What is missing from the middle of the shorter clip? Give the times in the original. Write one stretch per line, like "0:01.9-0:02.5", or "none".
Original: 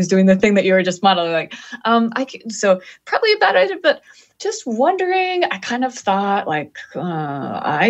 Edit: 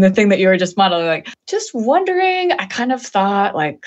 0:01.6-0:04.3